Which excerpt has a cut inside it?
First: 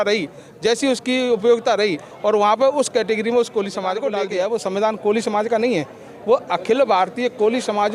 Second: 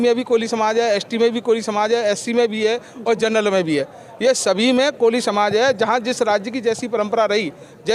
first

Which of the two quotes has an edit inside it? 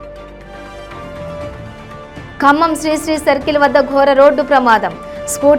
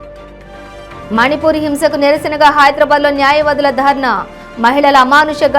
second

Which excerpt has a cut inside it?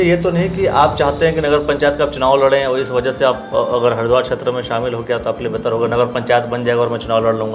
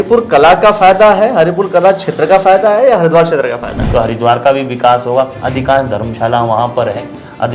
second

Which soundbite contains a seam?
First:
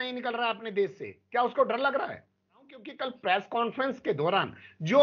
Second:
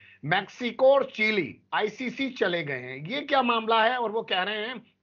first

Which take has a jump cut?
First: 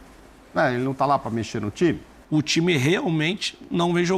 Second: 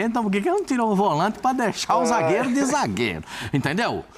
first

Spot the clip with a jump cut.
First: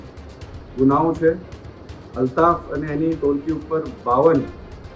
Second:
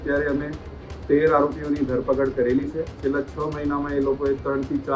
second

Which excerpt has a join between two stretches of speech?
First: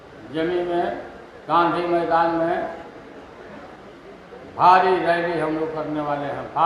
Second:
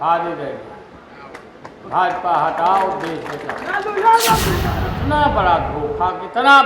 second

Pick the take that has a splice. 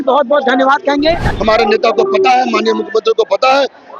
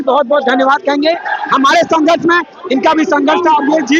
first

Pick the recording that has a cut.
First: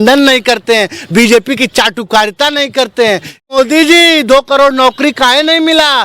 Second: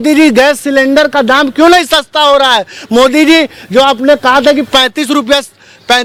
first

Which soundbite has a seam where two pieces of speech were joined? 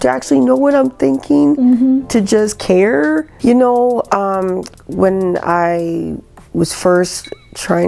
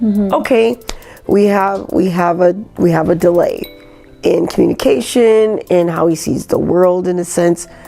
first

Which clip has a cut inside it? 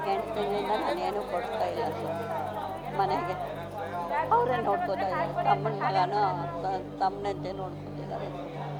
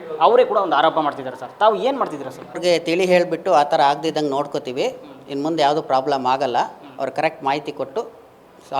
second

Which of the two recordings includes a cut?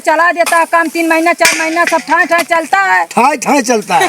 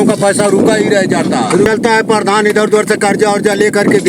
second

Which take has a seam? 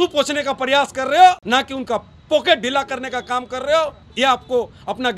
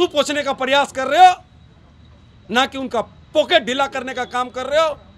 first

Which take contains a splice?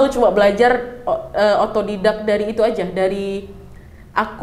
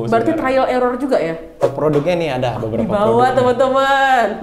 second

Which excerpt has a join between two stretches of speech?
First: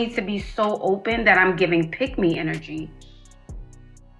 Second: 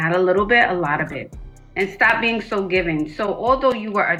first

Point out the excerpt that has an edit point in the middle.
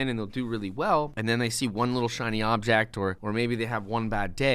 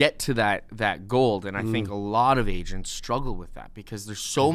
first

